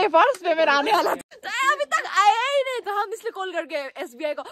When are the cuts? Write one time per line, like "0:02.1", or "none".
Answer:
0:01.3

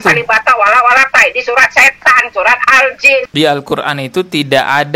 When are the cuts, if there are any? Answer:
0:03.3

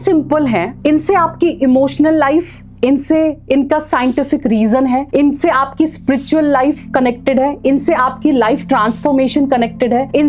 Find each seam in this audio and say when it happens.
none

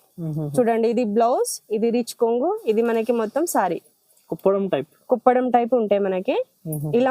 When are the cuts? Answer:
none

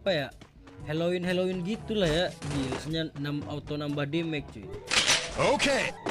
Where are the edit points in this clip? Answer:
0:02.7

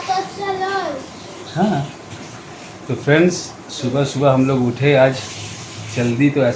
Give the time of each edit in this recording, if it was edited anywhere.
none

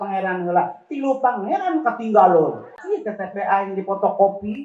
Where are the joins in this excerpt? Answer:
0:02.8

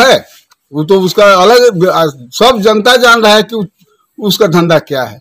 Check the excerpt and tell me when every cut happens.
none

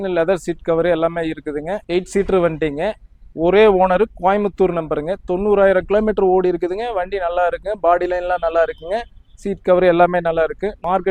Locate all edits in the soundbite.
0:01.7

